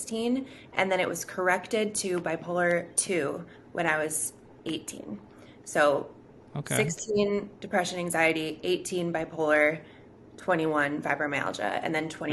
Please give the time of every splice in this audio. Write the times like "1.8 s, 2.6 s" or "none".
none

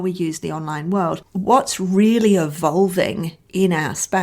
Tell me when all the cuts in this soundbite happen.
1.2 s

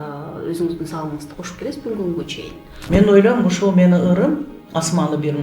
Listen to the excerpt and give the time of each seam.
2.8 s

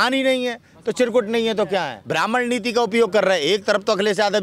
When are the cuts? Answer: 2.0 s

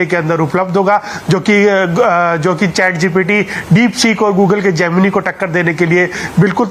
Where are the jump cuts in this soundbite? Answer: none

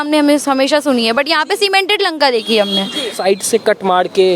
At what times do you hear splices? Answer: 3.2 s

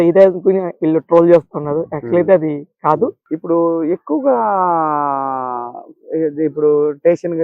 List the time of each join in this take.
3.3 s

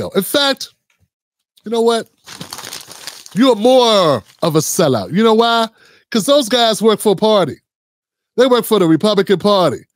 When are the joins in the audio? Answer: none

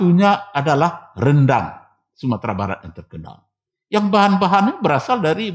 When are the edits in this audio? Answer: none

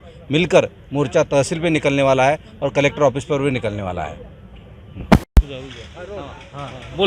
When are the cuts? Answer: 5.3 s

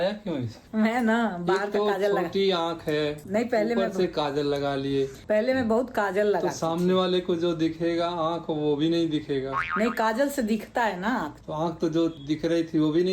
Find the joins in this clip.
11.4 s

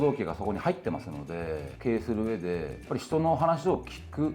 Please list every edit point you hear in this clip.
1.1 s

